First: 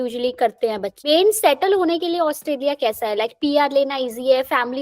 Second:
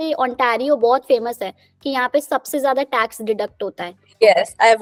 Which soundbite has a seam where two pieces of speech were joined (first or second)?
first